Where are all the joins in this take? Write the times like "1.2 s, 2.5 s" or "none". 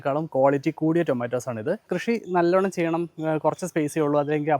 1.9 s